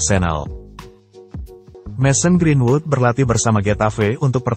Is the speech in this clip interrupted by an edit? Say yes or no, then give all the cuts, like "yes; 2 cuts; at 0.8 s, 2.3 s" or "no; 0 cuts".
yes; 1 cut; at 1.7 s